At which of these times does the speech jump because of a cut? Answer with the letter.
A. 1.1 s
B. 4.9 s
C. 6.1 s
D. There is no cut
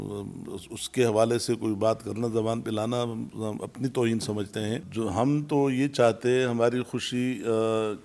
B